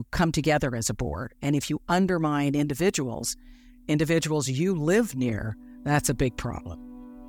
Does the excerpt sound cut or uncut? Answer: uncut